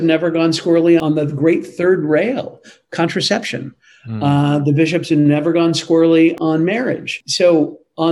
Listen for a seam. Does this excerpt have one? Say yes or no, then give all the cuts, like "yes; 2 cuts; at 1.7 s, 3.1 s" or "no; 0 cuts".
yes; 1 cut; at 1.0 s